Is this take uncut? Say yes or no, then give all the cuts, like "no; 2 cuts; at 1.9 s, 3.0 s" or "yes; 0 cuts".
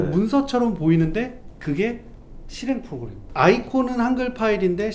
no; 1 cut; at 3.2 s